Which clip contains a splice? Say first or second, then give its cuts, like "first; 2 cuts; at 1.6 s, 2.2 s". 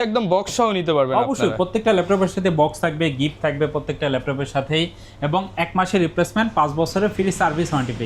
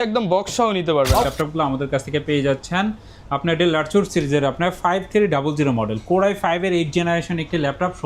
second; 1 cut; at 1.3 s